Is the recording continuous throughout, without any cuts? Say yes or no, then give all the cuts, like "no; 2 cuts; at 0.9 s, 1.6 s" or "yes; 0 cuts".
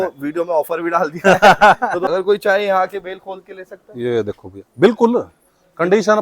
no; 1 cut; at 2.1 s